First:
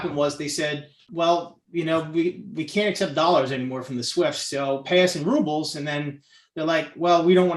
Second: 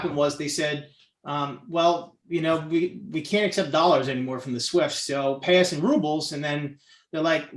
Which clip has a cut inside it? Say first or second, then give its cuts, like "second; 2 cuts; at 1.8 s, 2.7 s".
first; 1 cut; at 1.0 s